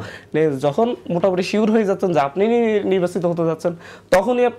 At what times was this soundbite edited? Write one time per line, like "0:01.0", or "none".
none